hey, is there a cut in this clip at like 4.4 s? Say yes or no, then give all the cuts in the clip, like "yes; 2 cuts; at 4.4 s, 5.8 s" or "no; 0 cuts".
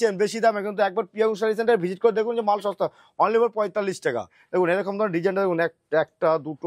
yes; 1 cut; at 4.4 s